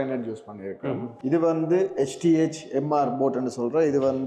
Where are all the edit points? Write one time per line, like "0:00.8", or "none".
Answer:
0:01.1